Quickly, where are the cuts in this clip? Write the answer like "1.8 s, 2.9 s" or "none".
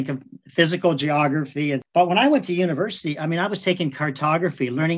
1.8 s